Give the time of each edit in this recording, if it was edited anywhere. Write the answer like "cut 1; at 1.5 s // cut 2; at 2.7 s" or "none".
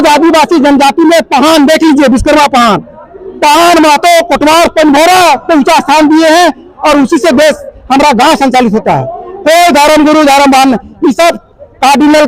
none